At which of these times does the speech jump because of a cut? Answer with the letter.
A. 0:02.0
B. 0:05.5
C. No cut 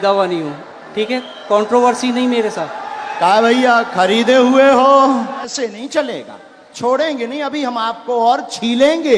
B